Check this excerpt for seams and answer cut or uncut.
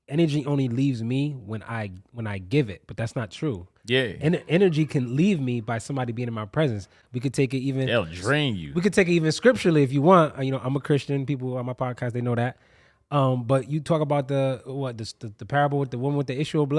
uncut